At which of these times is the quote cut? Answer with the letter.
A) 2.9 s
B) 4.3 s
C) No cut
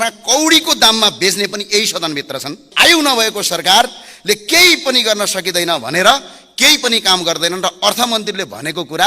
A